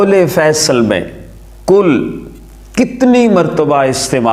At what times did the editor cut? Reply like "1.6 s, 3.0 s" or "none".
none